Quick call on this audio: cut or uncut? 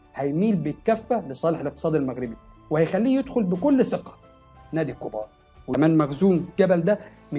cut